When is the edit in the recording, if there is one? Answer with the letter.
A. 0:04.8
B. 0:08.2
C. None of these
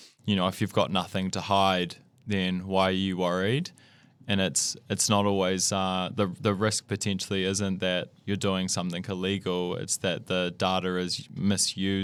C